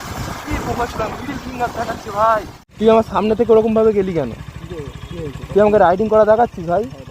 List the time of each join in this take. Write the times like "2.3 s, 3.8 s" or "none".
2.6 s